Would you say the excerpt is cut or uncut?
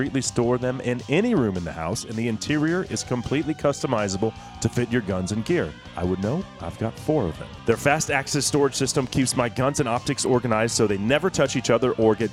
uncut